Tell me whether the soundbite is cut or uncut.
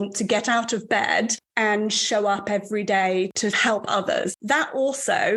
cut